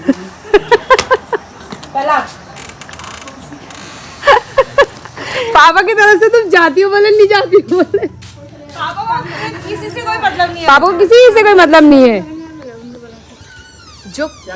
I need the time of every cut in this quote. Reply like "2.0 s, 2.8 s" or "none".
none